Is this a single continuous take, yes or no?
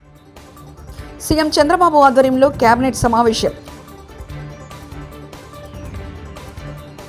no